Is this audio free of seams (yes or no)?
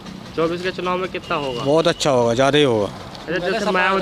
yes